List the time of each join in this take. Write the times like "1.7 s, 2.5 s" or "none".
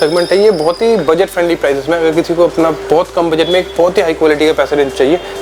none